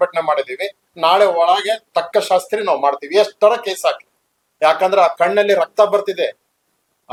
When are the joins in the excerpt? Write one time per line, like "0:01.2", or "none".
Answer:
none